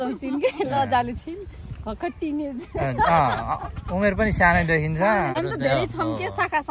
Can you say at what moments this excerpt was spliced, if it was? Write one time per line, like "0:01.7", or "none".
0:05.4